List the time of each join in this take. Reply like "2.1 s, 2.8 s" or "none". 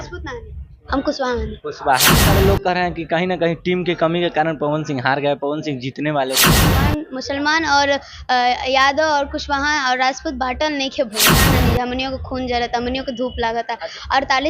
2.3 s, 6.6 s, 11.3 s